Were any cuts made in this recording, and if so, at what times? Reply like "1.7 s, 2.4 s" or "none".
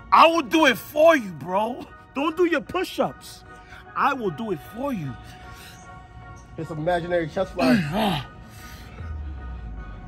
none